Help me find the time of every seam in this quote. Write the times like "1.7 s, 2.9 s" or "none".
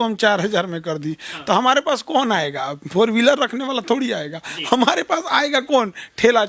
none